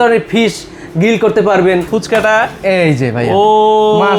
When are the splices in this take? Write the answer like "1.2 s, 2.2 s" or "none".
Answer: 1.9 s